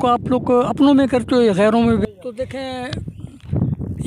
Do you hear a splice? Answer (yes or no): yes